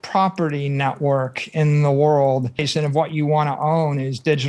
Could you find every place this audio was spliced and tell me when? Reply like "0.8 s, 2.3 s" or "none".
2.7 s